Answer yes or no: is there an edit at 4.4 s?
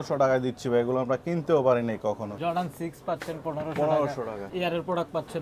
yes